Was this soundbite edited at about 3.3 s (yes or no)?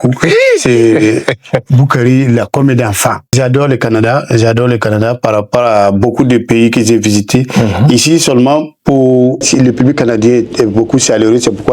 yes